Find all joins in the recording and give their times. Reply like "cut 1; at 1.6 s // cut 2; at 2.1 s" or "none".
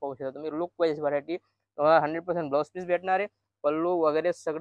none